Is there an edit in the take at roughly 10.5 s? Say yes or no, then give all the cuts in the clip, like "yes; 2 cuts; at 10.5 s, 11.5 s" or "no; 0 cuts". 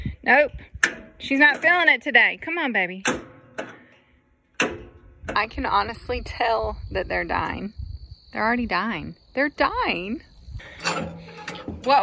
yes; 2 cuts; at 5.4 s, 10.5 s